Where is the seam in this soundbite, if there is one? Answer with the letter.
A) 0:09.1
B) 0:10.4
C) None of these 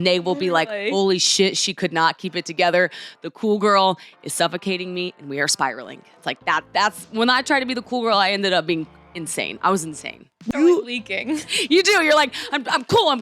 B